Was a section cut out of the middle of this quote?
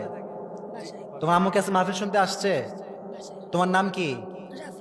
no; 0 cuts

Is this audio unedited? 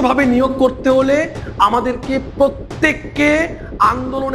yes; 0 cuts

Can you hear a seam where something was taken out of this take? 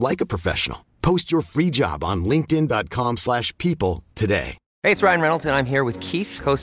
yes; 1 cut; at 4.6 s

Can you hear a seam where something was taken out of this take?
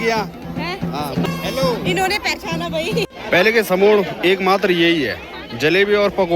yes; 2 cuts; at 1.2 s, 3.1 s

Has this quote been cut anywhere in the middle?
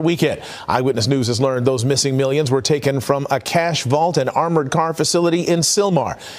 no; 0 cuts

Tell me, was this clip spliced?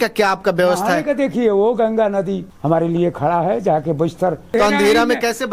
yes; 2 cuts; at 2.5 s, 4.5 s

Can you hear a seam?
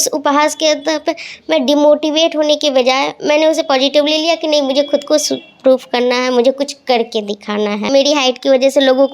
yes; 1 cut; at 7.9 s

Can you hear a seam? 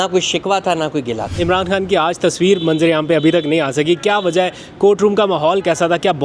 yes; 1 cut; at 1.3 s

